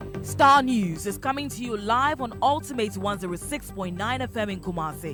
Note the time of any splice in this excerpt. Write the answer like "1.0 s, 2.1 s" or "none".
none

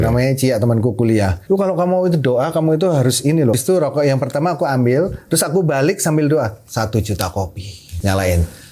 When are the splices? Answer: 1.4 s, 3.6 s, 7.8 s

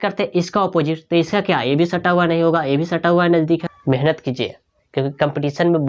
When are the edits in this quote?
3.7 s

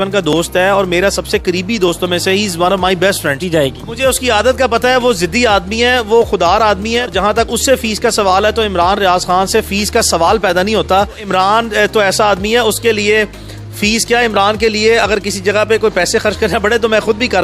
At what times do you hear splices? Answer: 3.5 s, 7.1 s, 11.3 s

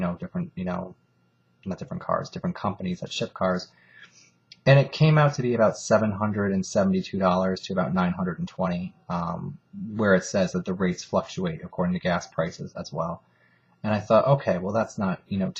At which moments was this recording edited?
none

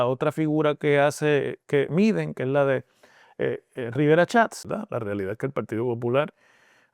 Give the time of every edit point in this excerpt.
4.6 s

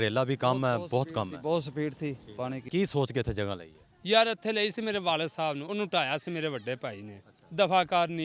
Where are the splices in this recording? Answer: 2.6 s

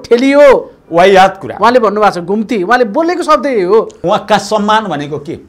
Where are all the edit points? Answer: 4.0 s

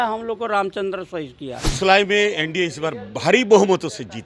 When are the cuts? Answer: 1.6 s

